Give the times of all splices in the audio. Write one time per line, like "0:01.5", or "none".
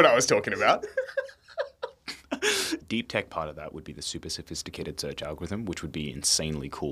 0:02.8